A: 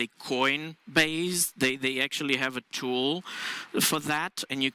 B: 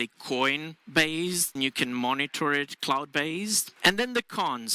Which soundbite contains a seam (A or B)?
B